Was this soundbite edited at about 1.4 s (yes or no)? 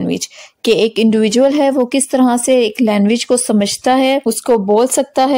no